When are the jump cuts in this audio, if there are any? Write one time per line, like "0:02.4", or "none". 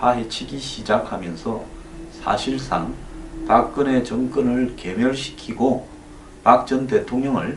0:06.7